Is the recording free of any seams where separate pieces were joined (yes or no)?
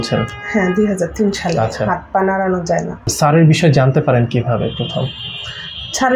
no